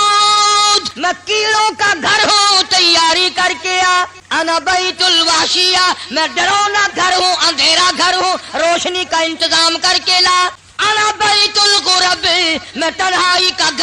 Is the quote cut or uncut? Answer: cut